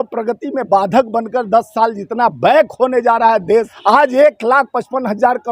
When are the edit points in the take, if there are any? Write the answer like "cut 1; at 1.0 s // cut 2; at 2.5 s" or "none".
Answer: cut 1; at 3.7 s